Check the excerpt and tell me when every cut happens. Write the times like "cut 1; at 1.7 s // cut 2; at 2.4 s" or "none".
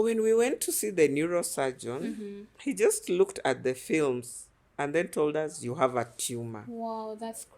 cut 1; at 2.4 s